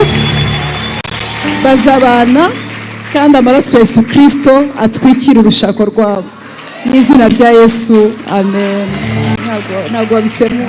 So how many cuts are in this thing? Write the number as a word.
zero